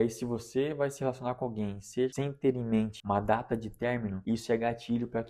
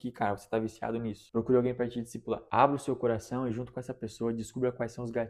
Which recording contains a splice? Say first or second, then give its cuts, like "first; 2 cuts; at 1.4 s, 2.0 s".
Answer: first; 3 cuts; at 2.1 s, 3.0 s, 4.2 s